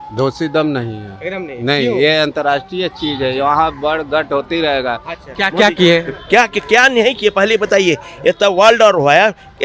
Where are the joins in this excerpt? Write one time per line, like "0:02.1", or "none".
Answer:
0:05.1